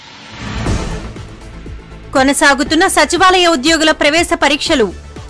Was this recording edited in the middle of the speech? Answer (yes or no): no